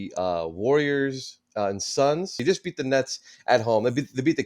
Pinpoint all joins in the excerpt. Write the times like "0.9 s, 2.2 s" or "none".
2.4 s